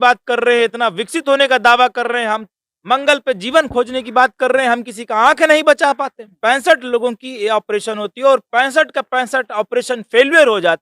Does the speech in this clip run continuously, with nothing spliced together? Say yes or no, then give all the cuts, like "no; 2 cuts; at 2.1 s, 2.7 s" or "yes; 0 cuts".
no; 1 cut; at 6.3 s